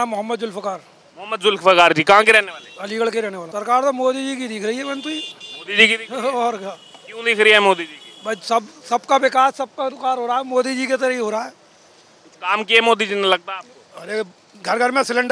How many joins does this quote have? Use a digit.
1